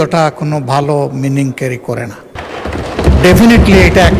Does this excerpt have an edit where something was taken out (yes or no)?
yes